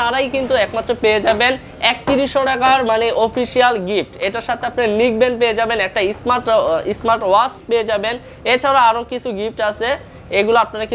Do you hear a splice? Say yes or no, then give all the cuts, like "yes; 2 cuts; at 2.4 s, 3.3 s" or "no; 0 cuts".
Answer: no; 0 cuts